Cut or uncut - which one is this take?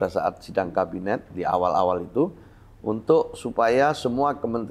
uncut